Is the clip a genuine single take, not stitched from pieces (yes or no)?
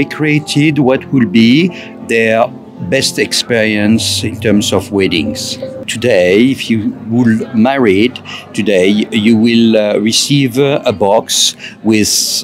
no